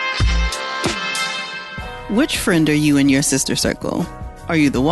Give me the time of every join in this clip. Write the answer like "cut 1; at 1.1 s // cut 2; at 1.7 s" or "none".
cut 1; at 1.3 s